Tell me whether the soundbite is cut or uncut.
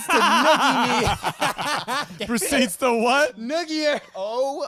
uncut